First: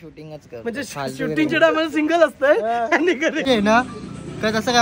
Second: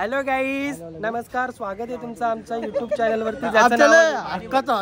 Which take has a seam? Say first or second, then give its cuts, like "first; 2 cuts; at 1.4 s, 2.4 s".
first; 1 cut; at 3.4 s